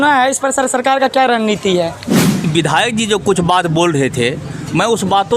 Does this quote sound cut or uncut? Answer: cut